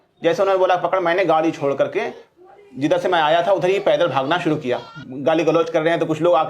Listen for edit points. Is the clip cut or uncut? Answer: cut